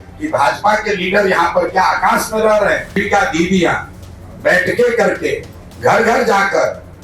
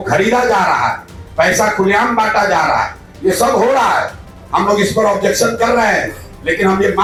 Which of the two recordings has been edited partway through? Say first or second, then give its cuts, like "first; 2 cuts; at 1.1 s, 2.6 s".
first; 1 cut; at 3.0 s